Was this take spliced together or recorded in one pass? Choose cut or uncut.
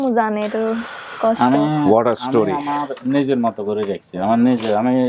uncut